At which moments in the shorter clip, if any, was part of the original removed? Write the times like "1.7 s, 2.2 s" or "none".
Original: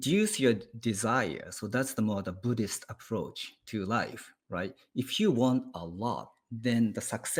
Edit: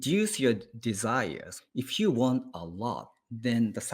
1.6 s